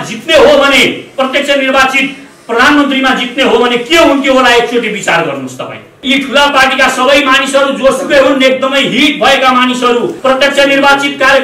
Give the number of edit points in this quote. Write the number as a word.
two